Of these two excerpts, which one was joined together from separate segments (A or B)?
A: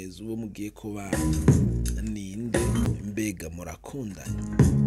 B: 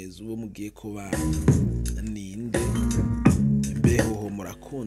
A